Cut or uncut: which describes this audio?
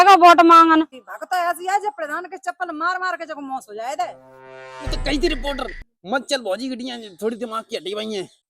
cut